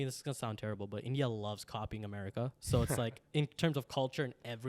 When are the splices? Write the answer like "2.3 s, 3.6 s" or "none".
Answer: none